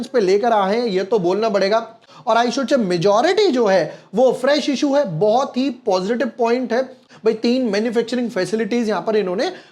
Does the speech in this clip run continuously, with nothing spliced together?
no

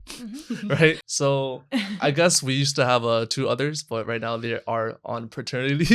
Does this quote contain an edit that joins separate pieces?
yes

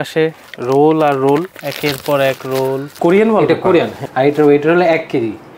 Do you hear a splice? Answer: yes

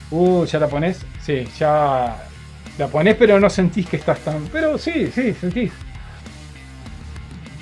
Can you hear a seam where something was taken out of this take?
yes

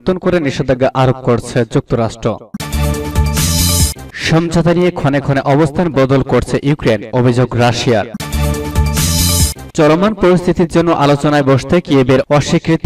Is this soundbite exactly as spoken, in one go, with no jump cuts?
no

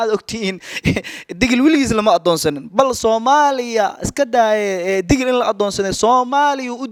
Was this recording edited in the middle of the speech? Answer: no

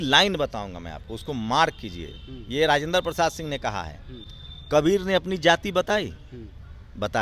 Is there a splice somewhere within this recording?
no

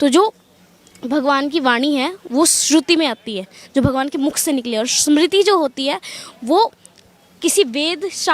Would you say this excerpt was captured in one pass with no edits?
yes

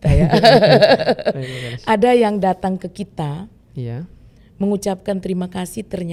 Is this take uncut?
yes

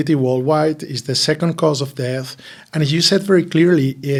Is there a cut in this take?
no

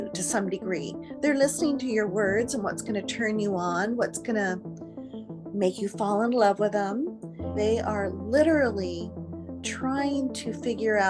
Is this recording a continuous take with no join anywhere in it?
no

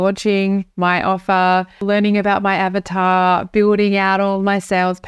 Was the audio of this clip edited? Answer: yes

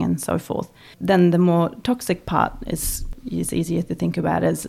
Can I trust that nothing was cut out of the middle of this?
no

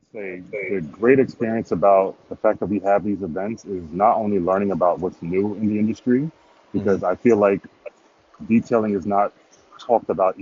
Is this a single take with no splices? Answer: yes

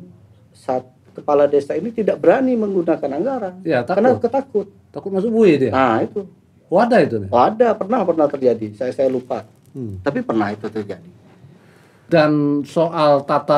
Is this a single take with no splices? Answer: no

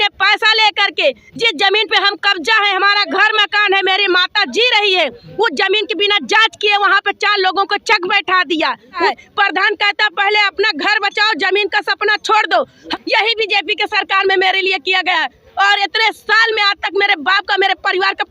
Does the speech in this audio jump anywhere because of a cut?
yes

